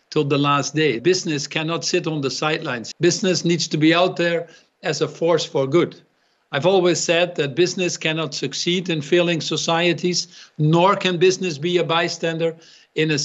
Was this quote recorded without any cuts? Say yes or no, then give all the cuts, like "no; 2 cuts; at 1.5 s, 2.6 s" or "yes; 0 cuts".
no; 2 cuts; at 1.0 s, 2.8 s